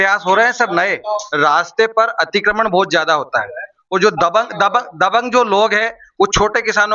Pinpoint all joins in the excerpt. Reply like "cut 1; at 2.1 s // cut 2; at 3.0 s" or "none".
cut 1; at 1.3 s